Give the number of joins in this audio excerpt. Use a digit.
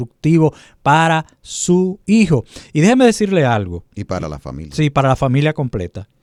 0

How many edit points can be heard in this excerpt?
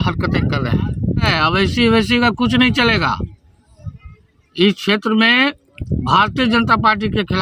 1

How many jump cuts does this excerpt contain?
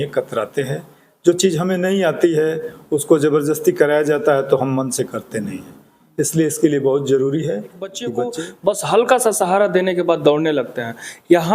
1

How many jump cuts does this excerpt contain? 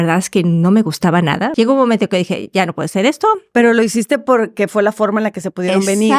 1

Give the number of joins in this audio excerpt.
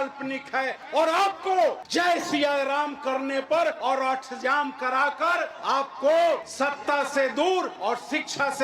5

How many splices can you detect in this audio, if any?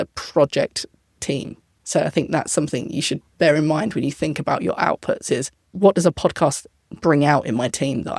1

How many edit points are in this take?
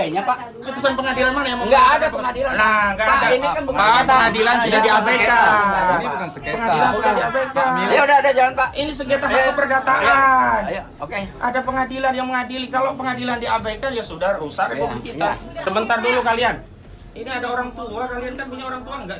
1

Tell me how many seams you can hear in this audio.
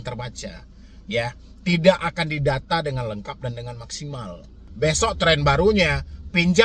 1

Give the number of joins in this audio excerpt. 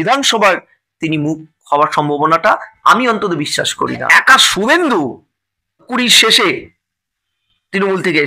2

